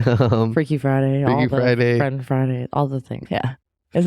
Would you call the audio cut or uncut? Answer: cut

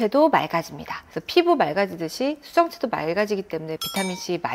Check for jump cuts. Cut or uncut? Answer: uncut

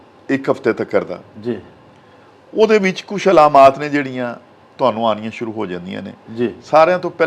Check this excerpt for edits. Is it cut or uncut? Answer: uncut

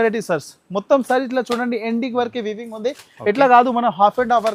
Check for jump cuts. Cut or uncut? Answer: uncut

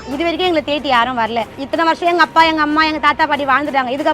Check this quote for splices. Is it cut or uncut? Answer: cut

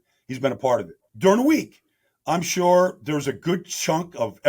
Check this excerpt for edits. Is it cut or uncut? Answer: cut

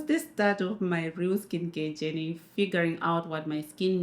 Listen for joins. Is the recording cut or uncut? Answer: uncut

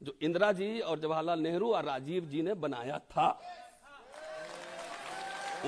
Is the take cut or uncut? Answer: uncut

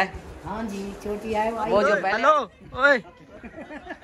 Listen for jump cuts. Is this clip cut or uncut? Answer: cut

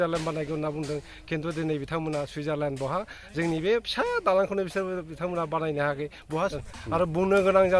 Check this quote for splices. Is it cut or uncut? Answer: cut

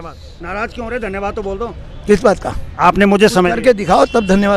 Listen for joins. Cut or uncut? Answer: uncut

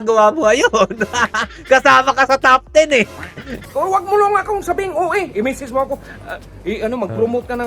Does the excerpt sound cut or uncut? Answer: uncut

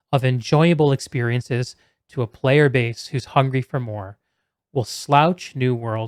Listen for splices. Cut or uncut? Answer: uncut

